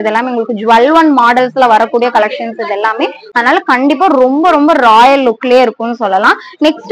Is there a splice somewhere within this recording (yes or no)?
no